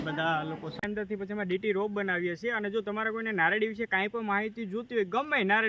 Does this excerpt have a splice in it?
yes; 1 cut; at 1.2 s

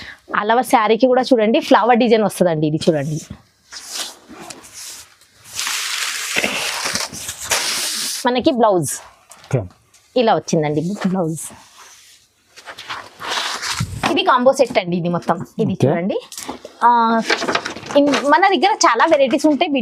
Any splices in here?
no; 0 cuts

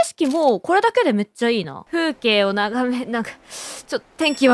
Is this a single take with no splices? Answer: no; 1 cut; at 1.8 s

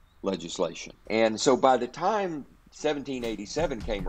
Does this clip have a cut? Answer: yes; 1 cut; at 1.0 s

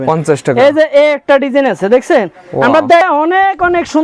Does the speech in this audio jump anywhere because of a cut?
yes; 1 cut; at 3.0 s

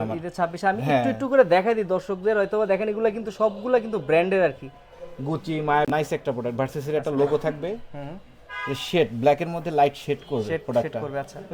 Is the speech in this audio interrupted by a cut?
no; 0 cuts

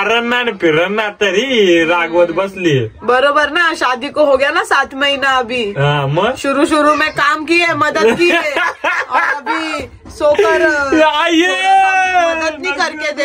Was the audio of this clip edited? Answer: no; 0 cuts

